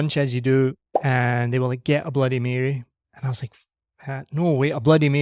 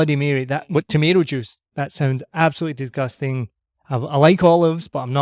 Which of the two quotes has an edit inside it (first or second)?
second